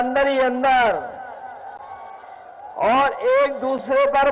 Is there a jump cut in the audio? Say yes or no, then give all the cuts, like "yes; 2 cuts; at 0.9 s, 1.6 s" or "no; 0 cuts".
no; 0 cuts